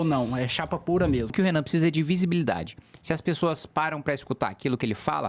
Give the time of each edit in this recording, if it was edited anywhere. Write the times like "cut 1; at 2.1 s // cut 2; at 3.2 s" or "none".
cut 1; at 1.3 s